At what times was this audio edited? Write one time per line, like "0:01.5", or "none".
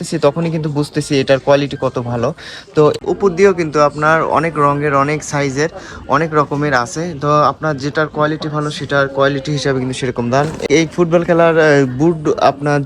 0:03.0
0:10.6